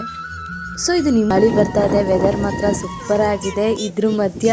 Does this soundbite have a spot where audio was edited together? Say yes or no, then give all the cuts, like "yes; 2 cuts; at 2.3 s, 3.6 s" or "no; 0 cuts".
yes; 1 cut; at 1.3 s